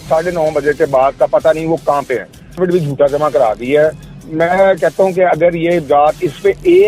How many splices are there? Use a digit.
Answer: 1